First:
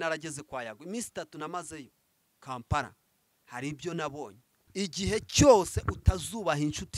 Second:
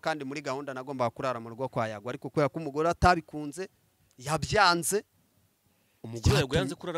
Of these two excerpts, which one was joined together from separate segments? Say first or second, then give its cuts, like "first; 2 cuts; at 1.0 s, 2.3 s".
first; 1 cut; at 4.6 s